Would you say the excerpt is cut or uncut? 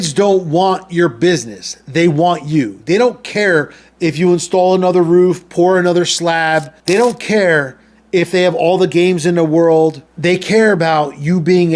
cut